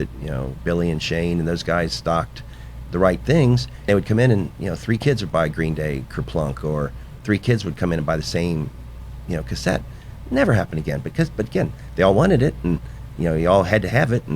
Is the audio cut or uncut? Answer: cut